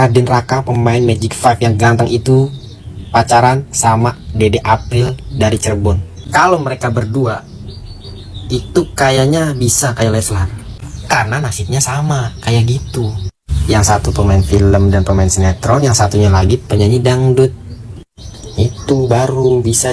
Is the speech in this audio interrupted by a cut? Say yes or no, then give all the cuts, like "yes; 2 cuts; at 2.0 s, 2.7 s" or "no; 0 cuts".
no; 0 cuts